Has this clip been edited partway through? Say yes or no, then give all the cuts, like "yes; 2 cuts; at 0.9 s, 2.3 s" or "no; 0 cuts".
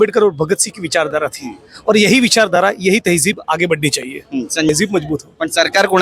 yes; 1 cut; at 4.7 s